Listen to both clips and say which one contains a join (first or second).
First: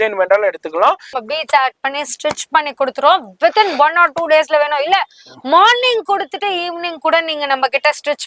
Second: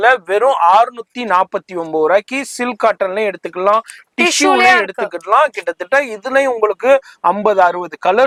first